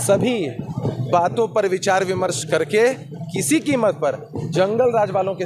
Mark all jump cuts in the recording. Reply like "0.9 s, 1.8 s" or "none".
none